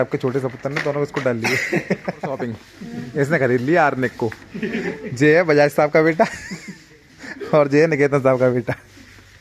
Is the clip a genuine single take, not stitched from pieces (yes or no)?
no